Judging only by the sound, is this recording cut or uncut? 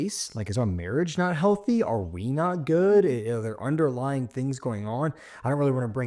uncut